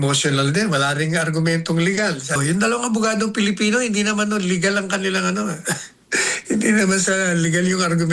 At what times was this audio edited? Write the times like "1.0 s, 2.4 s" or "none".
2.4 s